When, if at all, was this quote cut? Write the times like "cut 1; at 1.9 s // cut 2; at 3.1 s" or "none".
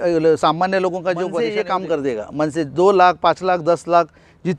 cut 1; at 1.4 s